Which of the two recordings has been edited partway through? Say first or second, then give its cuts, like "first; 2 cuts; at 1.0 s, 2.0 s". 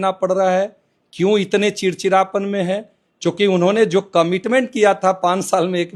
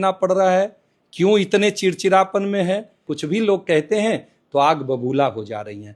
second; 1 cut; at 3.0 s